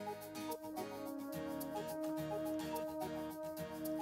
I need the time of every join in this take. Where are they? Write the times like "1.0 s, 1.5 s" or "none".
none